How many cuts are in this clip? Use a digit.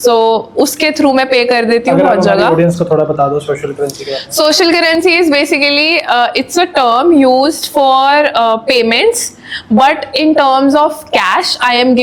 0